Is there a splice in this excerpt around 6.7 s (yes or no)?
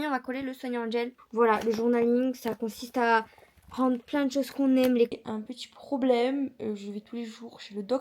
no